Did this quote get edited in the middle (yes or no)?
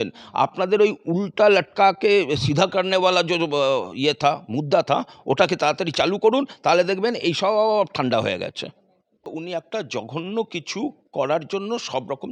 yes